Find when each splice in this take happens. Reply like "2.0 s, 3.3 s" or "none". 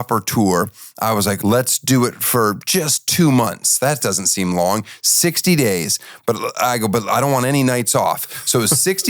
1.4 s